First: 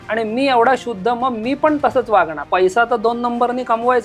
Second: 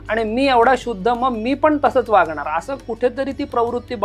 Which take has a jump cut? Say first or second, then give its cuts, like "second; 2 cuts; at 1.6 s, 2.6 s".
first; 1 cut; at 2.4 s